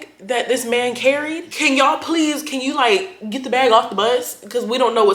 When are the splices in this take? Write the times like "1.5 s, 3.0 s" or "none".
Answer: none